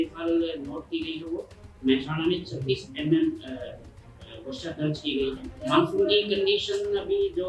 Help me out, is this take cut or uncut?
cut